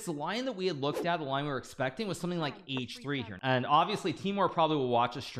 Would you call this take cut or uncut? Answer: cut